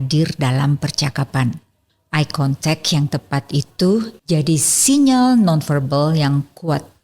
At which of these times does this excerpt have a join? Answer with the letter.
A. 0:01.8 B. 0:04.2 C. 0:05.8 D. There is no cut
B